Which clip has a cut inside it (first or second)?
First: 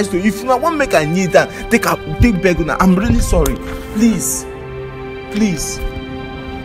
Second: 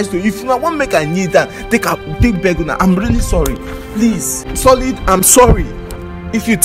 second